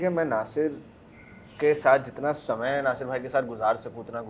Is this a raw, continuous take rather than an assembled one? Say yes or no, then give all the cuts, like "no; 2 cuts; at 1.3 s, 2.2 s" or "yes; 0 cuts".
yes; 0 cuts